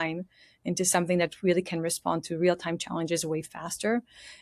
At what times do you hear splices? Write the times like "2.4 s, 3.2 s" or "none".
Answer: none